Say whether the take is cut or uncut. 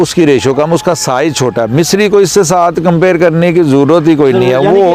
uncut